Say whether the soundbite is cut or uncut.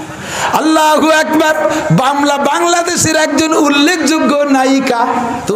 uncut